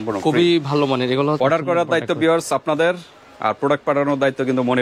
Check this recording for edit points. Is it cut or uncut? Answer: cut